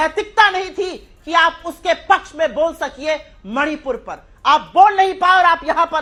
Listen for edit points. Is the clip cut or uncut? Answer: uncut